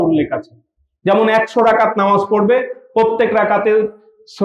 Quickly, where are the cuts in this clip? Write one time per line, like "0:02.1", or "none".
none